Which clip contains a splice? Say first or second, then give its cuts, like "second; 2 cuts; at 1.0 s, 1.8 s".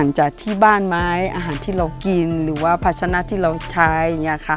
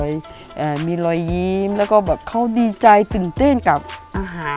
second; 1 cut; at 2.3 s